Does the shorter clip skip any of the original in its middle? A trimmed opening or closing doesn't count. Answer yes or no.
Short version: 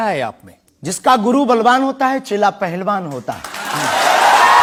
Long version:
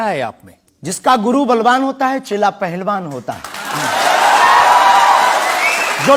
no